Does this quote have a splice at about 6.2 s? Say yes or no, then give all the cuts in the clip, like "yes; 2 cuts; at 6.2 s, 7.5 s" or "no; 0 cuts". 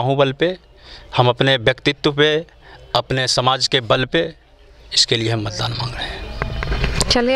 no; 0 cuts